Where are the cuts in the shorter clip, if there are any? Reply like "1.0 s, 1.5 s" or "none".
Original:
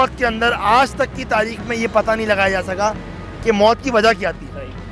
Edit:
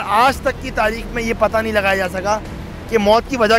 none